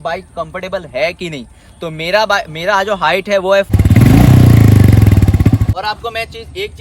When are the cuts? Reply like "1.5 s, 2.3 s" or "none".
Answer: 3.7 s, 5.7 s